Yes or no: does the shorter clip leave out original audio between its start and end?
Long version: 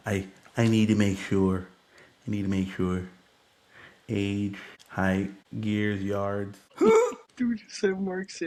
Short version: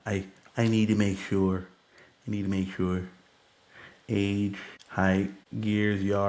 no